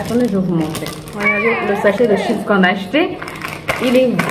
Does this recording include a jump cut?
no; 0 cuts

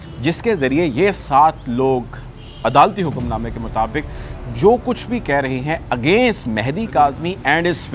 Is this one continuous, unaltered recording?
no; 1 cut; at 6.4 s

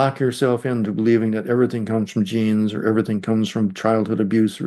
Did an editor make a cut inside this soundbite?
no; 0 cuts

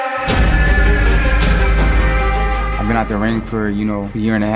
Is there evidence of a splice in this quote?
no; 0 cuts

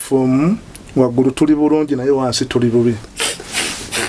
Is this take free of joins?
no; 1 cut; at 3.1 s

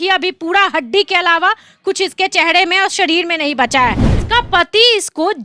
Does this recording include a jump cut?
yes; 1 cut; at 4.1 s

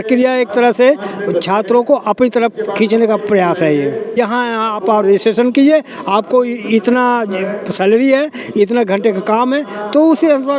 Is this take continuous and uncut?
no; 1 cut; at 4.2 s

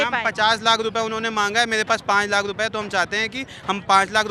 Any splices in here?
no; 0 cuts

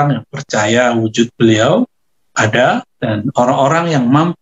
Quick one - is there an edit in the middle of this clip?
yes; 1 cut; at 2.9 s

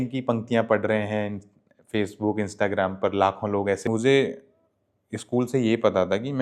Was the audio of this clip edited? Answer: yes; 1 cut; at 3.8 s

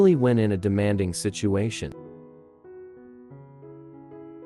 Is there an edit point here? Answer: no; 0 cuts

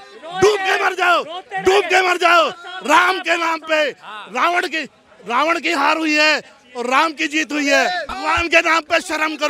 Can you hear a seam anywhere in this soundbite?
yes; 1 cut; at 8.1 s

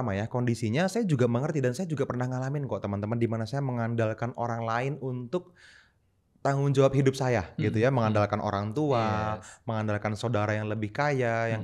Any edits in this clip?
no; 0 cuts

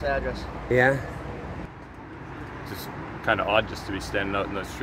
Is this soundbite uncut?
no; 1 cut; at 1.6 s

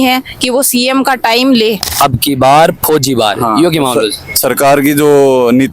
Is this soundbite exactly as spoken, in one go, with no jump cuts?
no; 1 cut; at 1.9 s

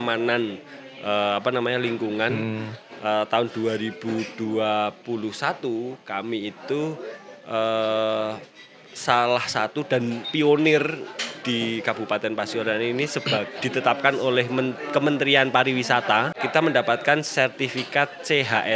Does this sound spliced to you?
yes; 1 cut; at 16.4 s

